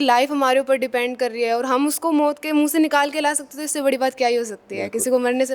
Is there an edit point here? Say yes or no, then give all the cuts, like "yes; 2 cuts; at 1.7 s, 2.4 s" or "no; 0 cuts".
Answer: no; 0 cuts